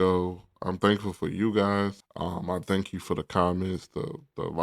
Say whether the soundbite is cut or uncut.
cut